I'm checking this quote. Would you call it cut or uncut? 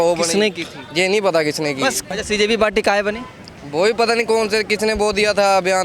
cut